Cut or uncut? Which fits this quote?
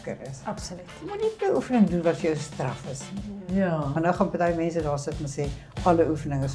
uncut